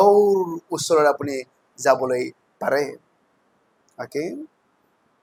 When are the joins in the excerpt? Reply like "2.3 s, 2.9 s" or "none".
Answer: none